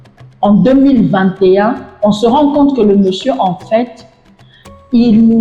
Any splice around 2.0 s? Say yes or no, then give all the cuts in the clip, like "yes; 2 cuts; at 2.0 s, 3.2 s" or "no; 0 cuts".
no; 0 cuts